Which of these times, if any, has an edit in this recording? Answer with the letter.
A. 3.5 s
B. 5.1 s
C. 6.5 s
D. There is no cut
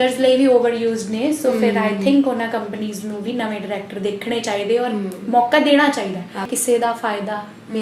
C